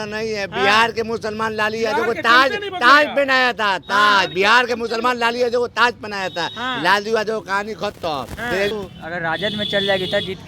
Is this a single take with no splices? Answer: no; 1 cut; at 8.7 s

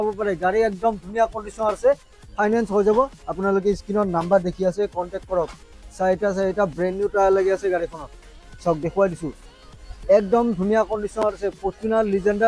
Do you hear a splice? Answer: no; 0 cuts

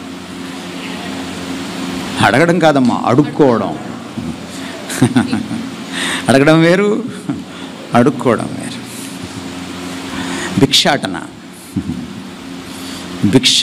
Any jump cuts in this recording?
no; 0 cuts

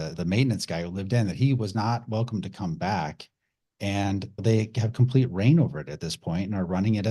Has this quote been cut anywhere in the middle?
no; 0 cuts

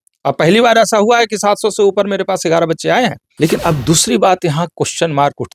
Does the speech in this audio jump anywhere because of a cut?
yes; 1 cut; at 3.2 s

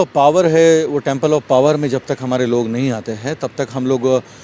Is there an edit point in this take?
no; 0 cuts

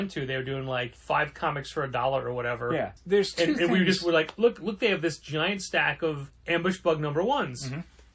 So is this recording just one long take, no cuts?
no; 3 cuts; at 0.9 s, 3.0 s, 6.3 s

